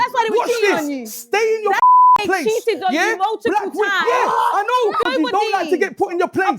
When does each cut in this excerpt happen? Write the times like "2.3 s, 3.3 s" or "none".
5.1 s

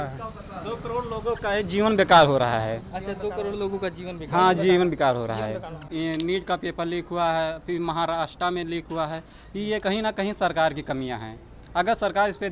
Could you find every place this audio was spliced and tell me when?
5.8 s

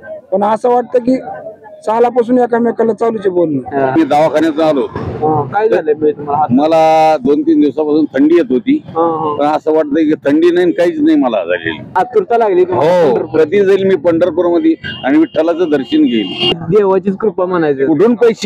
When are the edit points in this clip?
3.9 s, 11.9 s, 16.5 s

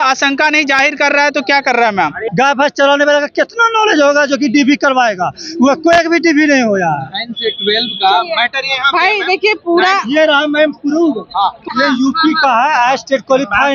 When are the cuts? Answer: 2.3 s, 11.6 s

